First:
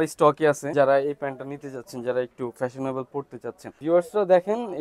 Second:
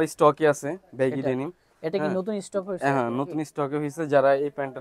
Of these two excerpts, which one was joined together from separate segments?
first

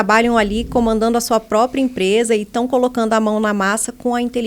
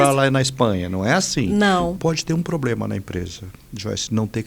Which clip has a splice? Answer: second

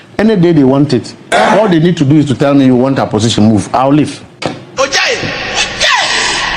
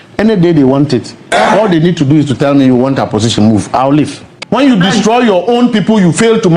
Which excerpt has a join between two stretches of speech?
second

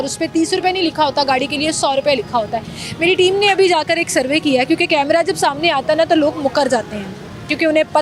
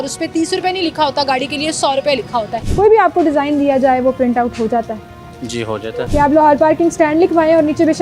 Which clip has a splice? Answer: second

